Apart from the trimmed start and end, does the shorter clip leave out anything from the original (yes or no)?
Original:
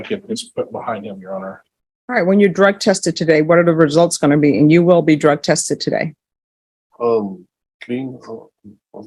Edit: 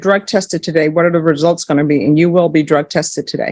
no